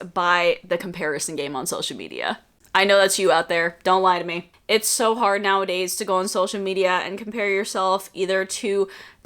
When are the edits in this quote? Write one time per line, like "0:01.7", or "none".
none